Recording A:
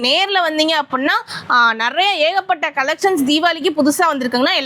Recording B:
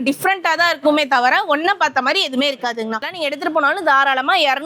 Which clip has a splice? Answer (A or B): B